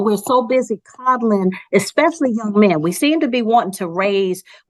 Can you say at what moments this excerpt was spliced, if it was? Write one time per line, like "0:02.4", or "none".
none